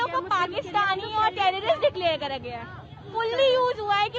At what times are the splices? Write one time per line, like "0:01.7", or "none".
0:03.0